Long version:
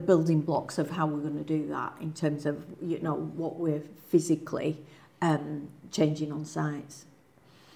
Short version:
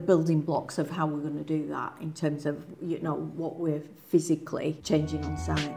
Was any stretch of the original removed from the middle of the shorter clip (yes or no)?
yes